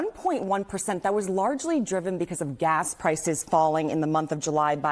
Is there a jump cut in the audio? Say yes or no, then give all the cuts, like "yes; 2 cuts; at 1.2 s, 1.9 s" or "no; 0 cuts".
yes; 1 cut; at 2.7 s